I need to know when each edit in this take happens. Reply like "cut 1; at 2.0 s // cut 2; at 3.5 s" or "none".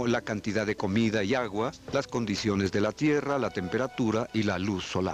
cut 1; at 3.0 s